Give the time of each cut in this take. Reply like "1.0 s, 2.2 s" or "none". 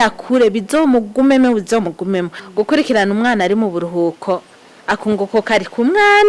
2.4 s